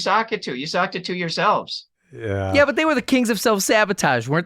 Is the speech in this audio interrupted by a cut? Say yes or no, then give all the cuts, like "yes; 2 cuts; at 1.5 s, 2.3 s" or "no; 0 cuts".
yes; 1 cut; at 2.5 s